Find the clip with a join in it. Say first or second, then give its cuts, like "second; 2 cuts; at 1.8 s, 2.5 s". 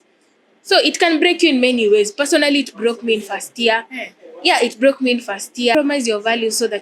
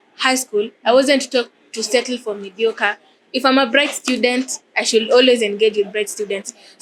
first; 1 cut; at 5.7 s